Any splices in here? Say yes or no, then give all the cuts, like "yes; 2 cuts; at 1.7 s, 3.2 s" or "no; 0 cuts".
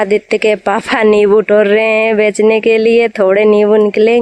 no; 0 cuts